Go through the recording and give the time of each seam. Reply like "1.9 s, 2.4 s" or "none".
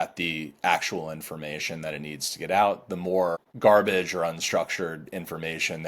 3.5 s